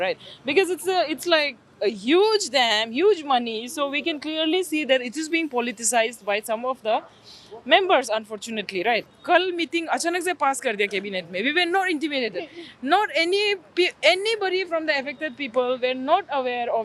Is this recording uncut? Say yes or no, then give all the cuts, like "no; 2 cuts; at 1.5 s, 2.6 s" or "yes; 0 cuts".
no; 1 cut; at 9.1 s